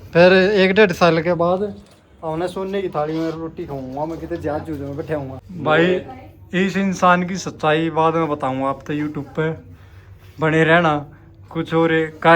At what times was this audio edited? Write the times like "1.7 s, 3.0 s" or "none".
5.4 s